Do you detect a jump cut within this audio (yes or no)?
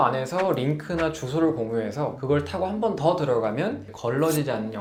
no